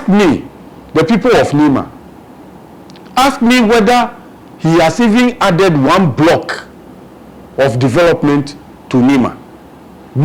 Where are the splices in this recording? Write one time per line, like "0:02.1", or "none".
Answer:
none